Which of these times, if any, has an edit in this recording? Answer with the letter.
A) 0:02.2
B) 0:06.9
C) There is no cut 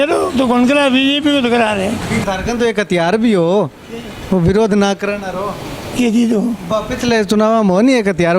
A